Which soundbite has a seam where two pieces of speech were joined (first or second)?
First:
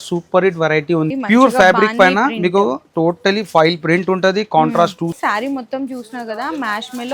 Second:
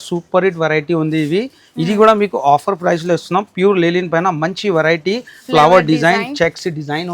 first